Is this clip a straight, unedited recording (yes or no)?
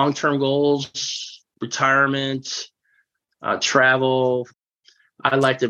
no